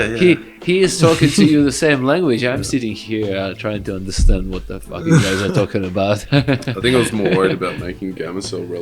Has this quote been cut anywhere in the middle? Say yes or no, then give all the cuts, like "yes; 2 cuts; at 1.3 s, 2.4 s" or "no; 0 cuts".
no; 0 cuts